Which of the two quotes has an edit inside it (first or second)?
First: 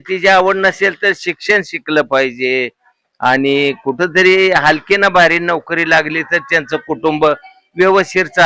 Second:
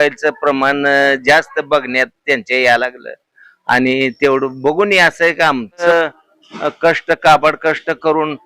second